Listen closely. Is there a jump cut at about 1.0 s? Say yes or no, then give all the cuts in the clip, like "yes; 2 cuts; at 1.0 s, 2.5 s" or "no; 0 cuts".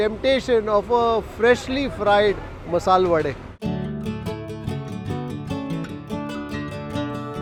no; 0 cuts